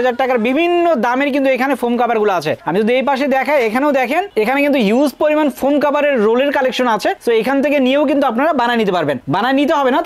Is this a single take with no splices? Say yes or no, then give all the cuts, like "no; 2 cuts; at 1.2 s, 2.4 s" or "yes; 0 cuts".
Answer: yes; 0 cuts